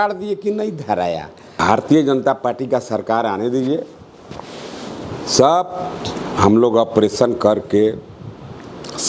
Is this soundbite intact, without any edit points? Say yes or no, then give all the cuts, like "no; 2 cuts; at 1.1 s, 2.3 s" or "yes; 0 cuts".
no; 1 cut; at 1.6 s